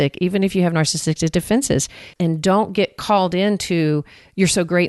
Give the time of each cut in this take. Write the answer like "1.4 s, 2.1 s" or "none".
2.0 s